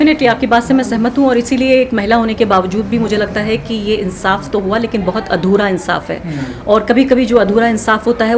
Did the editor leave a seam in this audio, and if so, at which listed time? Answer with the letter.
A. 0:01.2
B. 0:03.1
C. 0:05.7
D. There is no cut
D